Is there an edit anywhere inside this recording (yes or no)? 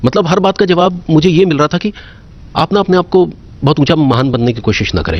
no